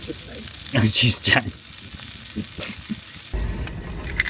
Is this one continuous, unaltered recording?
yes; 0 cuts

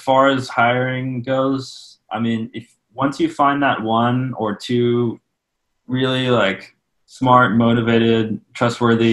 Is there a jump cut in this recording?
no; 0 cuts

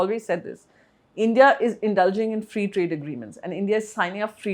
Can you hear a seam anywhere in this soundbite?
no; 0 cuts

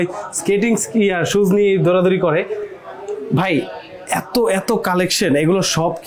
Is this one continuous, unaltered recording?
yes; 0 cuts

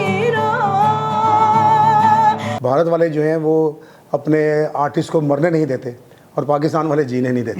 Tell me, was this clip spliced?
yes; 1 cut; at 2.5 s

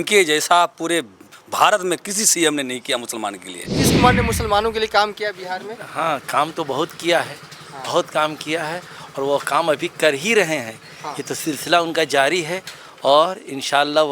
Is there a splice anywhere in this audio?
yes; 1 cut; at 3.8 s

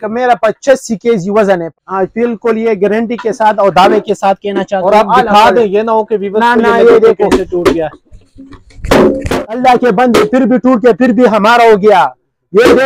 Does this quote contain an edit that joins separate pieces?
no; 0 cuts

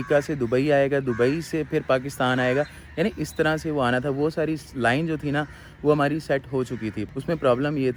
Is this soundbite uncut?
yes; 0 cuts

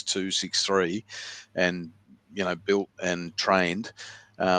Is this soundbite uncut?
yes; 0 cuts

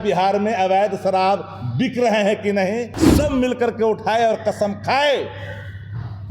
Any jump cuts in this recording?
yes; 1 cut; at 3.0 s

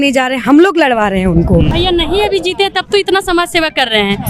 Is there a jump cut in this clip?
yes; 1 cut; at 1.7 s

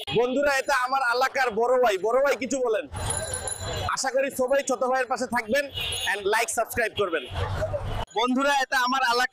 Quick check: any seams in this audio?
yes; 1 cut; at 8.1 s

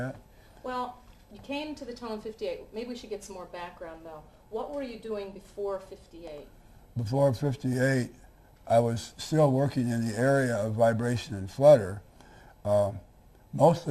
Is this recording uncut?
yes; 0 cuts

